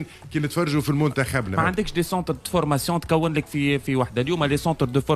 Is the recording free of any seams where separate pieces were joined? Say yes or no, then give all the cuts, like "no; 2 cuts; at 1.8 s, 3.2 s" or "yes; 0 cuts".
no; 1 cut; at 1.5 s